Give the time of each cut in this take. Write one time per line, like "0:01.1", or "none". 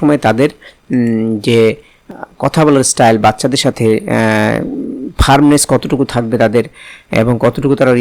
0:02.1